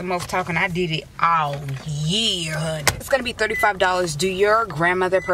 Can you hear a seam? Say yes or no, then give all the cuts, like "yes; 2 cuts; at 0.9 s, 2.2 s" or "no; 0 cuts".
yes; 1 cut; at 3.1 s